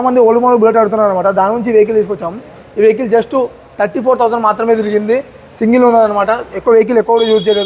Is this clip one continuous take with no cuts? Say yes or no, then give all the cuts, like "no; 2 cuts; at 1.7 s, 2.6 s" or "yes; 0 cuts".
yes; 0 cuts